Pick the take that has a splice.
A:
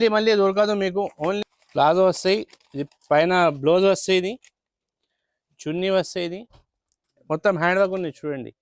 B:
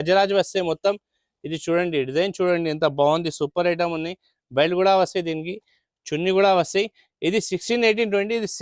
A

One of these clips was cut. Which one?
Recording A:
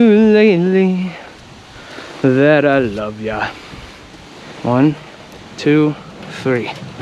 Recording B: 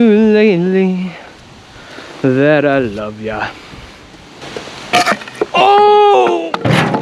B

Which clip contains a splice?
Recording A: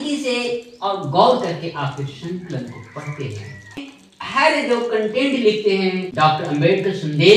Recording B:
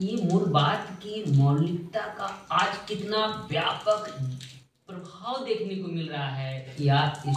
A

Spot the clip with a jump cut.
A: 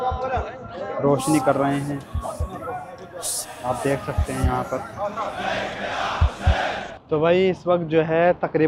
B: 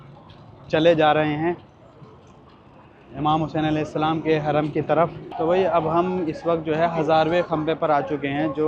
B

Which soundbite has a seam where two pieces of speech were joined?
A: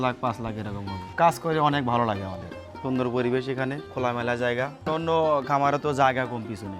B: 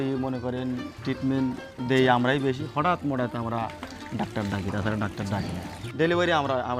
A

